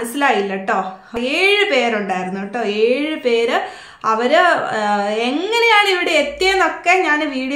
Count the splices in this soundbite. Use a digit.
1